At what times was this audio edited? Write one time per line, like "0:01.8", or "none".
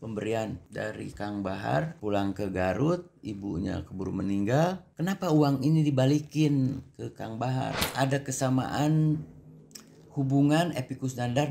0:07.9